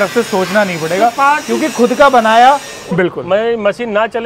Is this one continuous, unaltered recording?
no; 1 cut; at 2.7 s

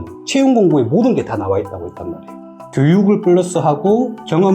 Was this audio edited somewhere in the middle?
yes; 1 cut; at 2.5 s

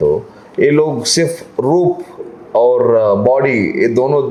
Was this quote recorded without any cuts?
yes; 0 cuts

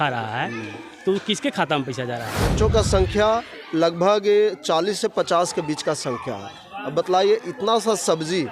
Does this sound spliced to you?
yes; 1 cut; at 2.4 s

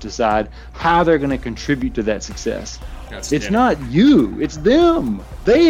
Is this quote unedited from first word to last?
yes; 0 cuts

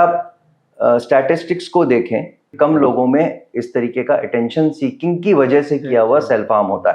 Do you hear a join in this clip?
yes; 1 cut; at 2.4 s

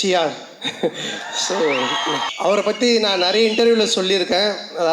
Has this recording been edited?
yes; 1 cut; at 2.3 s

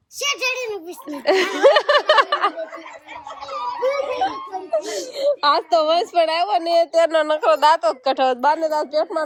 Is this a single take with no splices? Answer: yes; 0 cuts

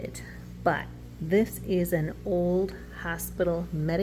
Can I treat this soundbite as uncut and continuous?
yes; 0 cuts

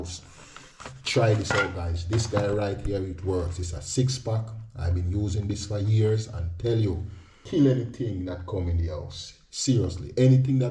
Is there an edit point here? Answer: yes; 1 cut; at 7.3 s

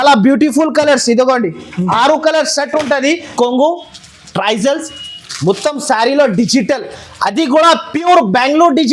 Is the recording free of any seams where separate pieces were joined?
no; 1 cut; at 3.3 s

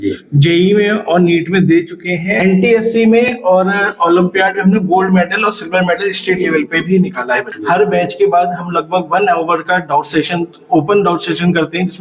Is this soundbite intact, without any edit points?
no; 2 cuts; at 2.3 s, 7.5 s

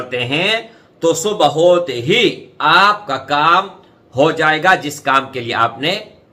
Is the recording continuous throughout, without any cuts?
yes; 0 cuts

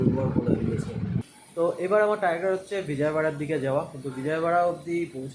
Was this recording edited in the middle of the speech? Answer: yes; 1 cut; at 1.2 s

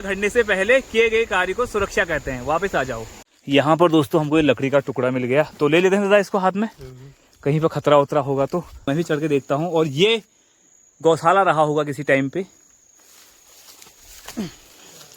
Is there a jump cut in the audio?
yes; 2 cuts; at 3.2 s, 8.8 s

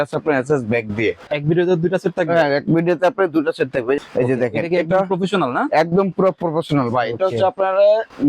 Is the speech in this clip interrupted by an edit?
yes; 2 cuts; at 1.2 s, 4.0 s

